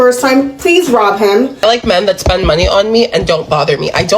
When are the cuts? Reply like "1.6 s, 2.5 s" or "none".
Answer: 1.9 s